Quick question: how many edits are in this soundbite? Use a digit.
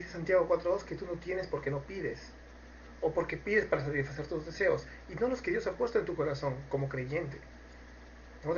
1